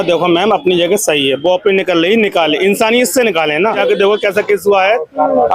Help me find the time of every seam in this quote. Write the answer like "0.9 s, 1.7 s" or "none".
3.8 s